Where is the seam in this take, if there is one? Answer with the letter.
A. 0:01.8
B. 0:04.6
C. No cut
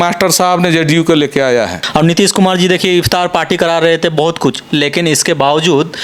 A